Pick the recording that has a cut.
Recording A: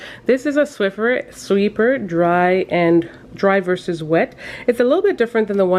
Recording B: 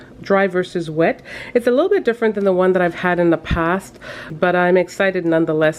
B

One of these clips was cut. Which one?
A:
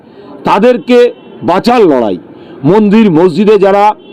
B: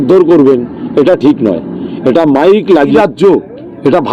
B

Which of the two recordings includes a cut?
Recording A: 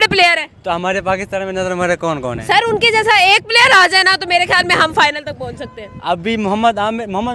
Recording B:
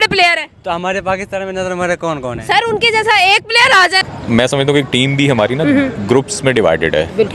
B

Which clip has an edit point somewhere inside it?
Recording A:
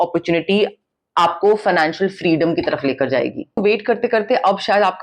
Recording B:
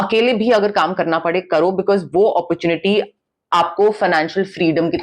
A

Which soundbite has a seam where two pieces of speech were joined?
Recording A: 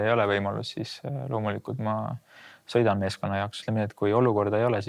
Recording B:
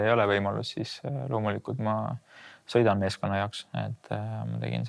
A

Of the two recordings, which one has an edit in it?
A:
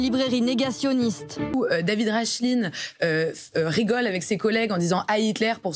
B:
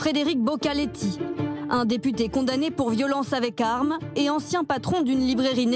A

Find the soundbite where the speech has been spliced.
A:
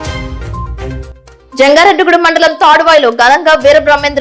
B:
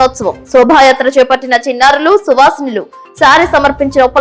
A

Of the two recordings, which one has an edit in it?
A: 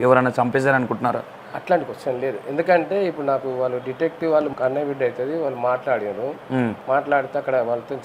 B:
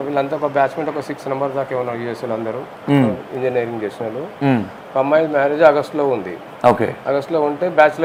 A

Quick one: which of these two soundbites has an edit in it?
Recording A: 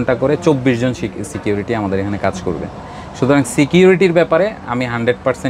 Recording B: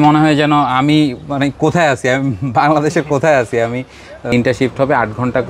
B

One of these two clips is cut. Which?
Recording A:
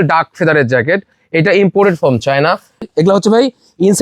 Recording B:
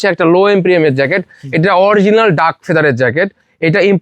A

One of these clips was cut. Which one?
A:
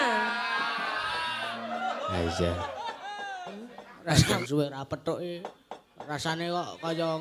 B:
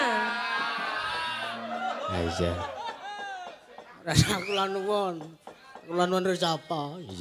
A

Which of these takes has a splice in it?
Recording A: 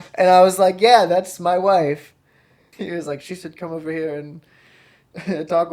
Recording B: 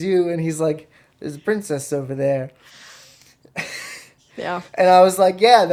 A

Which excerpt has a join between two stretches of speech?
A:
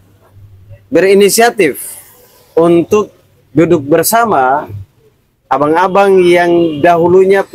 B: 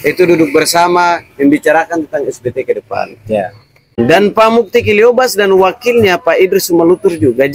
B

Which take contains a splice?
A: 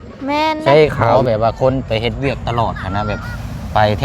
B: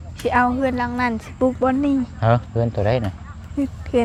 A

